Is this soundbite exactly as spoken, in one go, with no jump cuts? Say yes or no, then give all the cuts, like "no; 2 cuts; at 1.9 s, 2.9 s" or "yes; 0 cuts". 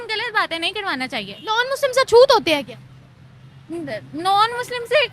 no; 1 cut; at 1.6 s